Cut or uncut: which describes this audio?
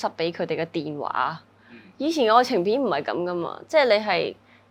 uncut